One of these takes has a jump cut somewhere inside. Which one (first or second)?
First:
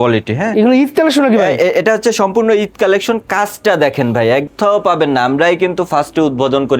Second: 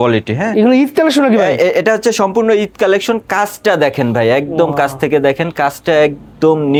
first